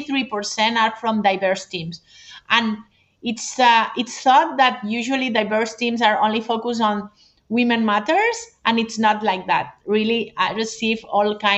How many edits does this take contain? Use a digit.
0